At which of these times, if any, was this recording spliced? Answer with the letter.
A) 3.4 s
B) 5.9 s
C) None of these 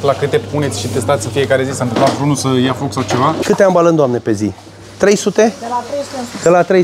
A